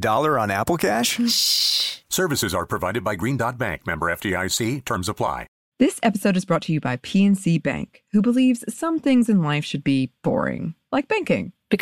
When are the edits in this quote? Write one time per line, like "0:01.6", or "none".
0:05.6